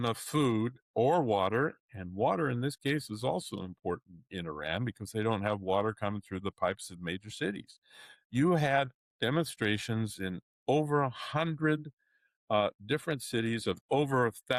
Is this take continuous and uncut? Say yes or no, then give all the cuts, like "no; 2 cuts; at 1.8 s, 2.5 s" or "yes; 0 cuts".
yes; 0 cuts